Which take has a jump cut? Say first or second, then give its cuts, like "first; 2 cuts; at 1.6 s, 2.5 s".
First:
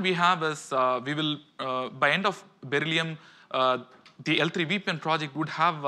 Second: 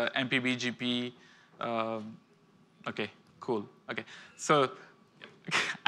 first; 1 cut; at 2.5 s